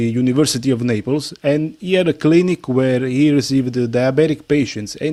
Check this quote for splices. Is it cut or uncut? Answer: uncut